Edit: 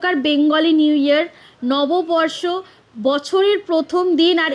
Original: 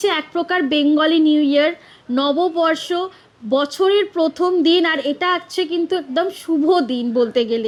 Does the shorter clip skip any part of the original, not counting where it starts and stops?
no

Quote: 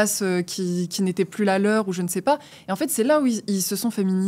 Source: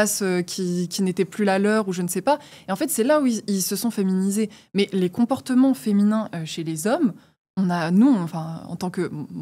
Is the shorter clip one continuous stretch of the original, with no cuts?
yes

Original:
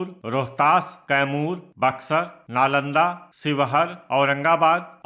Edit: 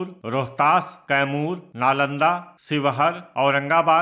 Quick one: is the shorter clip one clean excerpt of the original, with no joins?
no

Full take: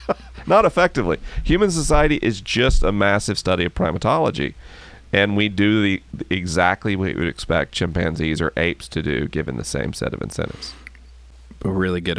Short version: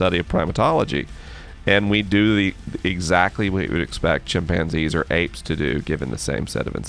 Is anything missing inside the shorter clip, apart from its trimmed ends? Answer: no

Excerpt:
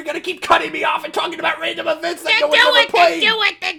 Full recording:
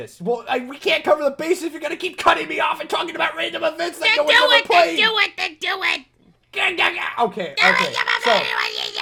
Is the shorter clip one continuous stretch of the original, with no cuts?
yes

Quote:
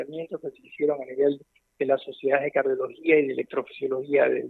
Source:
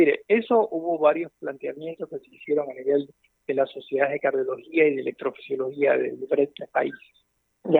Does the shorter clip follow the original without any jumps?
yes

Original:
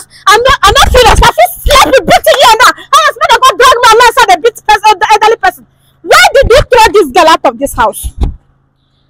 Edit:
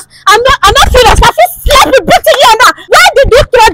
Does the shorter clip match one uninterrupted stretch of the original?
no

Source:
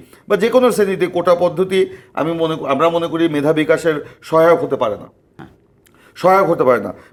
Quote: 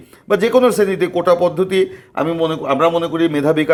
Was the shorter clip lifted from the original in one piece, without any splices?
yes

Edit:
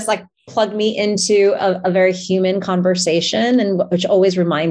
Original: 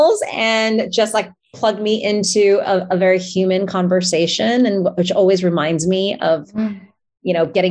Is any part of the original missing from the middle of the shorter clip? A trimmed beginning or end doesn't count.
no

